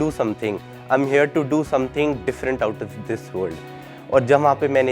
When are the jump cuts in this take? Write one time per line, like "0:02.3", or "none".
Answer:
none